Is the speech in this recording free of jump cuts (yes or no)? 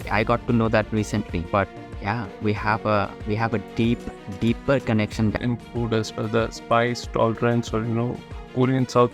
no